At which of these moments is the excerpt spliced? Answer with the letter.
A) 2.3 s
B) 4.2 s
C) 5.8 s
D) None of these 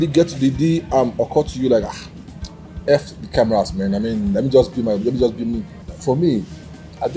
C